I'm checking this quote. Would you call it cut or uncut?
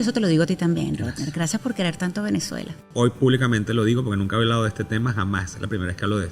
cut